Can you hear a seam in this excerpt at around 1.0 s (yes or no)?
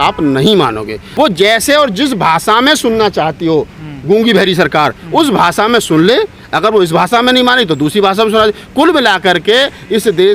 yes